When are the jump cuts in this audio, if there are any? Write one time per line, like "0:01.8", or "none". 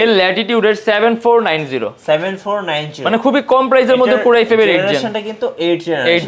none